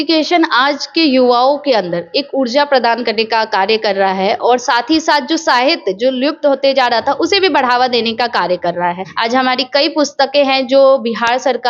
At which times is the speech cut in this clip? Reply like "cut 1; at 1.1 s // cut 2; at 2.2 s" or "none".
cut 1; at 9.1 s